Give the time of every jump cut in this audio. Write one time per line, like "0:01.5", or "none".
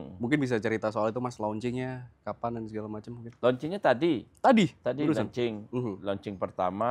none

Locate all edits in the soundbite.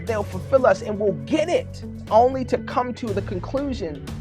0:02.0

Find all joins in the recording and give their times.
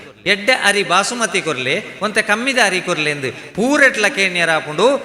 none

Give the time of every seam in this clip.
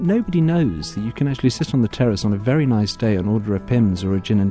none

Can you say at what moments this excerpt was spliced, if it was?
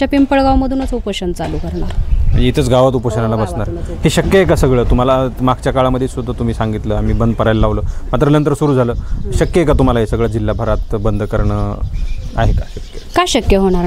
none

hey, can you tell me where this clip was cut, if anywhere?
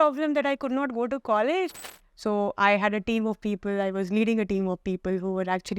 0:01.9

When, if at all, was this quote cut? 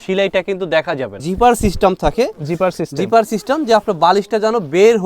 0:01.2

